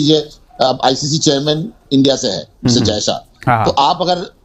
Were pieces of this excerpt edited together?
no; 0 cuts

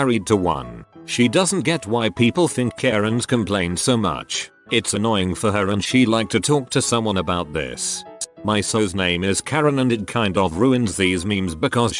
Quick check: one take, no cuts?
yes; 0 cuts

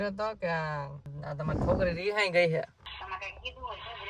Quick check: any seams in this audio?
yes; 1 cut; at 2.8 s

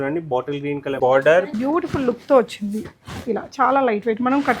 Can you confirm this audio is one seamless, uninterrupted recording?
no; 1 cut; at 1.5 s

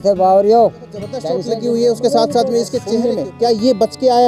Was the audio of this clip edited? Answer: yes; 2 cuts; at 1.3 s, 2.9 s

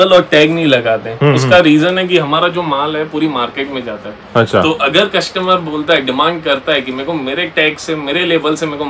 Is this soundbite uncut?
yes; 0 cuts

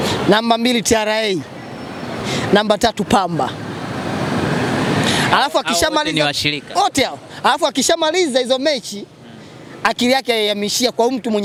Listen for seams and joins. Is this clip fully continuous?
yes; 0 cuts

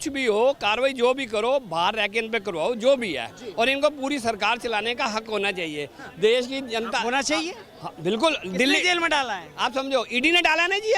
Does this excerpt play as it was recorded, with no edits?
yes; 0 cuts

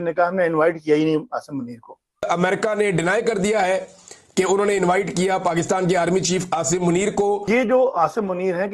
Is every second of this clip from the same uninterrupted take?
no; 2 cuts; at 2.3 s, 7.7 s

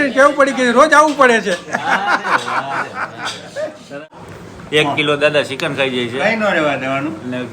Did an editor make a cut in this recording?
yes; 1 cut; at 4.3 s

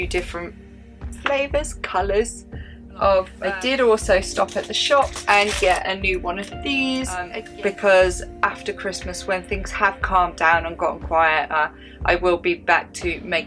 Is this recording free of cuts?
no; 2 cuts; at 3.4 s, 7.4 s

